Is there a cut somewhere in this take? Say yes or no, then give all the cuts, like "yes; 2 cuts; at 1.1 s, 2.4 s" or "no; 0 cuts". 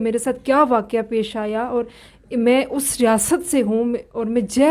no; 0 cuts